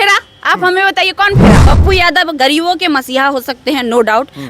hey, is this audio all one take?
no; 1 cut; at 1.6 s

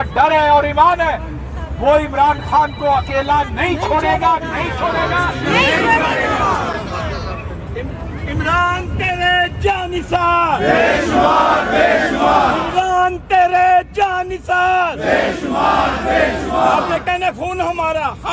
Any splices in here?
no; 0 cuts

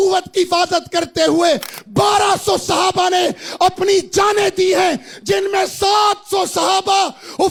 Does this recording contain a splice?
no; 0 cuts

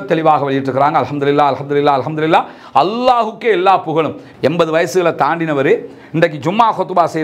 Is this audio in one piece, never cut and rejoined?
no; 1 cut; at 4.2 s

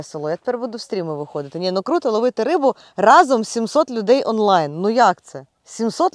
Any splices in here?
no; 0 cuts

